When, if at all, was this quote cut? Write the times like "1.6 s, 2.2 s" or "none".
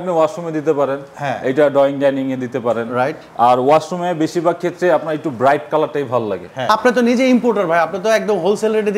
6.6 s